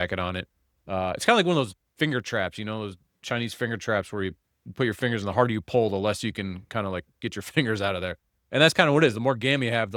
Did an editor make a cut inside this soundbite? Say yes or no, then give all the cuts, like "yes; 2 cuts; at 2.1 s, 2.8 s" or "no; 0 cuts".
no; 0 cuts